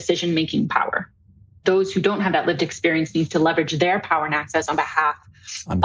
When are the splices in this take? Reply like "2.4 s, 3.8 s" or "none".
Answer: 1.6 s